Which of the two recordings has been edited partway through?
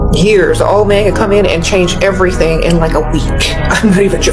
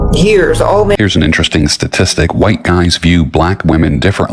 second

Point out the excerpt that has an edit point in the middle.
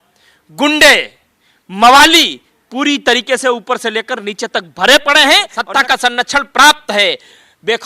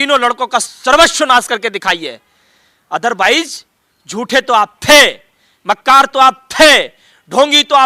first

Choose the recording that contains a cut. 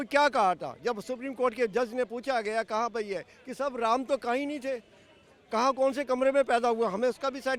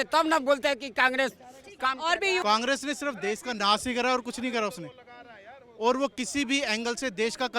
second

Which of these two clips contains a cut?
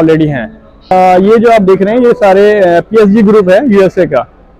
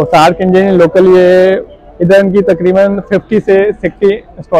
first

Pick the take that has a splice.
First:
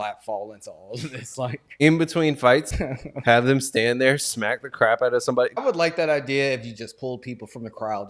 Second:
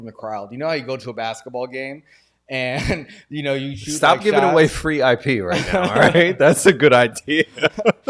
first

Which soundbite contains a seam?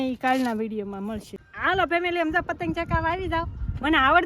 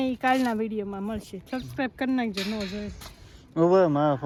first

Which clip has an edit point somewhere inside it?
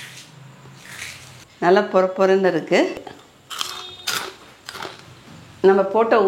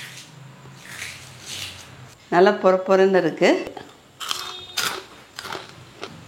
first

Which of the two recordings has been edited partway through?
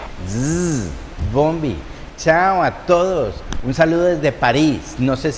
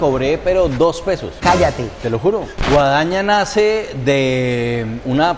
second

